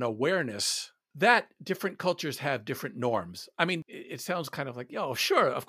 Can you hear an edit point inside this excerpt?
no; 0 cuts

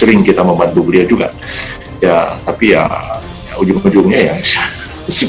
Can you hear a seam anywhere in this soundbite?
no; 0 cuts

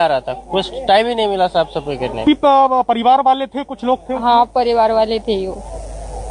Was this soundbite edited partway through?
no; 0 cuts

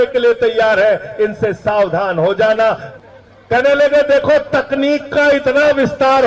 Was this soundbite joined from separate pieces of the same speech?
yes; 1 cut; at 2.9 s

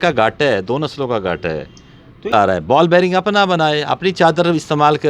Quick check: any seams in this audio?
yes; 1 cut; at 2.3 s

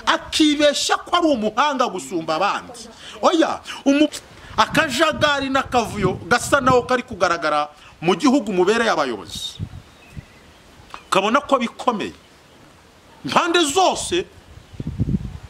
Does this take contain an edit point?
yes; 1 cut; at 4.2 s

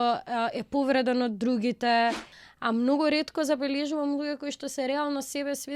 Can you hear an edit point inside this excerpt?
yes; 1 cut; at 2.3 s

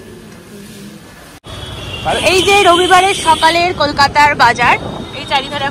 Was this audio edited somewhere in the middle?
yes; 1 cut; at 1.4 s

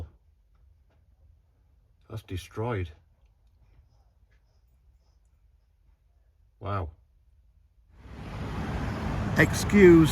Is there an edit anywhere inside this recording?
yes; 1 cut; at 8.0 s

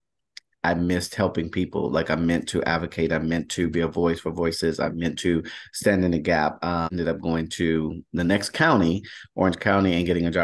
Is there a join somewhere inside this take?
yes; 1 cut; at 6.9 s

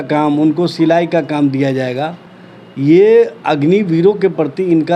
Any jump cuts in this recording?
no; 0 cuts

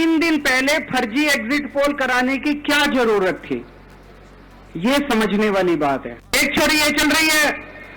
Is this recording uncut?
no; 1 cut; at 6.3 s

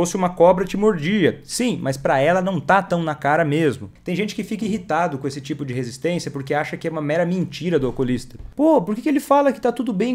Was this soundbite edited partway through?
yes; 2 cuts; at 3.9 s, 8.4 s

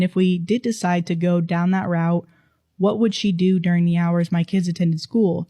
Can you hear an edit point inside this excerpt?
no; 0 cuts

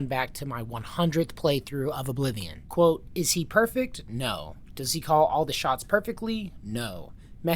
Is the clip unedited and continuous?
no; 1 cut; at 2.5 s

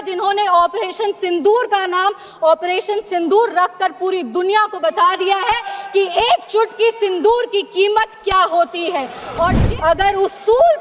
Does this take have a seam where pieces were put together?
yes; 1 cut; at 9.6 s

